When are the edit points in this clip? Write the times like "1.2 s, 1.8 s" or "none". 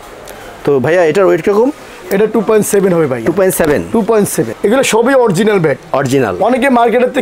4.5 s